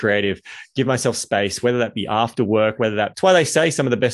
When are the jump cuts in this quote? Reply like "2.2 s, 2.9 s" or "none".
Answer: 3.1 s